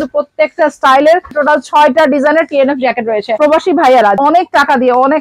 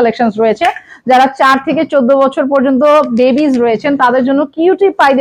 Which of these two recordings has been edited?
first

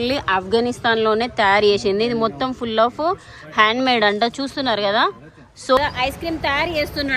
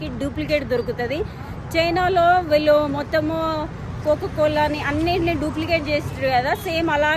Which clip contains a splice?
first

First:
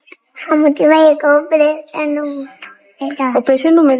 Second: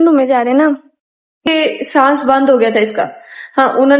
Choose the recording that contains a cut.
second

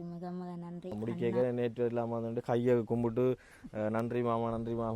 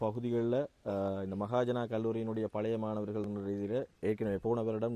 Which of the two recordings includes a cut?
first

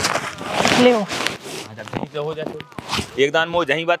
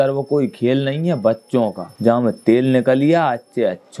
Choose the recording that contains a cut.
second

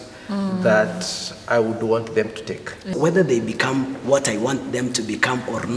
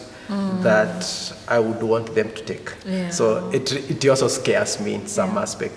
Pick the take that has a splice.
first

